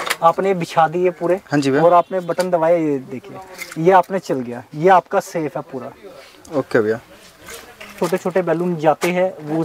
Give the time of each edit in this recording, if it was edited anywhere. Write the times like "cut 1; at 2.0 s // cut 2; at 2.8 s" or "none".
cut 1; at 7.8 s